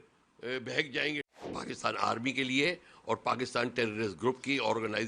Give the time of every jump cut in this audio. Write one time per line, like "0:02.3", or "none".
0:01.5